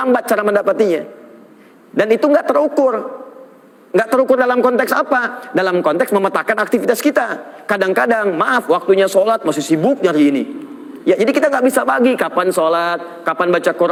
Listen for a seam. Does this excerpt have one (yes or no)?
no